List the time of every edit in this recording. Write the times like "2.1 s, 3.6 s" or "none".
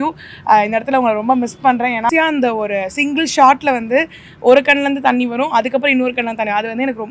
2.1 s